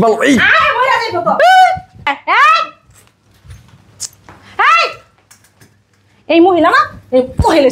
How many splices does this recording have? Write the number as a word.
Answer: one